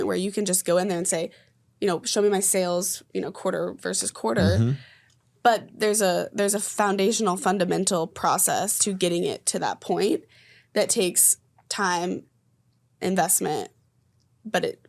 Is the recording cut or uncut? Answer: uncut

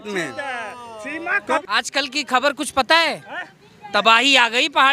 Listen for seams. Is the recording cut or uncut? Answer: cut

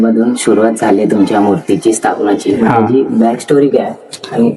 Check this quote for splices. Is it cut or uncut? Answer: uncut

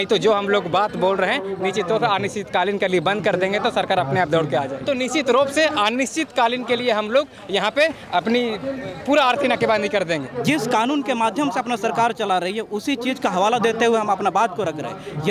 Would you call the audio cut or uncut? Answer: cut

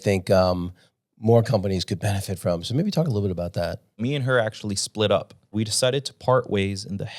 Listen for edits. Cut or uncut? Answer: cut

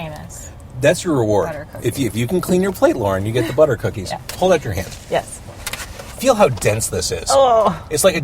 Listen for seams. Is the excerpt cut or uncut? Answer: cut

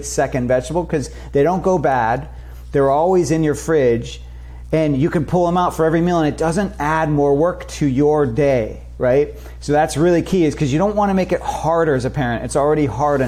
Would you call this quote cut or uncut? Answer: uncut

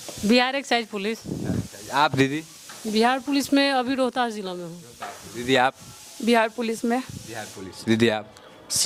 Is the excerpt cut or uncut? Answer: uncut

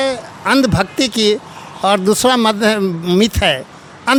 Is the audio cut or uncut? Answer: uncut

